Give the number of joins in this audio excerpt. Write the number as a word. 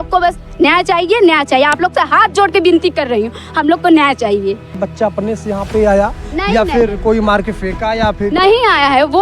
one